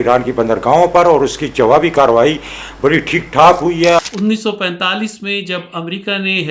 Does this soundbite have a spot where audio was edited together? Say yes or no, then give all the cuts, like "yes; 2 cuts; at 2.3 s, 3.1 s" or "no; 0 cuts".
yes; 1 cut; at 4.0 s